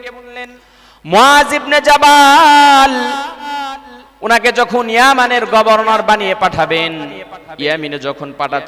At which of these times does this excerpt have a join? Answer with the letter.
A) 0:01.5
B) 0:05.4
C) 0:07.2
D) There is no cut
D